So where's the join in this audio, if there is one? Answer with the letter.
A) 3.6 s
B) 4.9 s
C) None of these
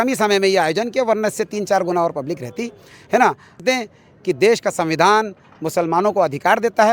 A